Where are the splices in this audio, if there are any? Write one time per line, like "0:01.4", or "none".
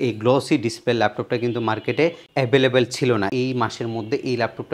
0:03.3